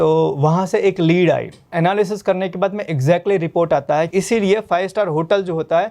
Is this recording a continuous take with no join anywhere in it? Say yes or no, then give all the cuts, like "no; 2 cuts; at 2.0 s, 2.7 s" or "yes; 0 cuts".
no; 2 cuts; at 1.7 s, 4.1 s